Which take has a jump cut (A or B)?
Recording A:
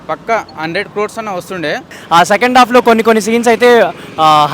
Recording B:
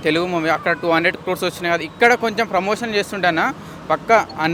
A